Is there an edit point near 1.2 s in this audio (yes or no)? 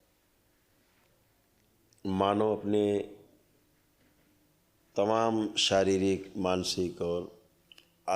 yes